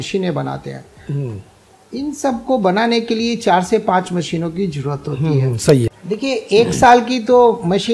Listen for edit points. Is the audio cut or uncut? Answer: cut